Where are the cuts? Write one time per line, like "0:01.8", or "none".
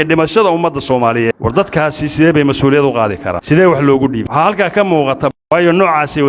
0:01.3
0:03.3
0:04.3
0:05.3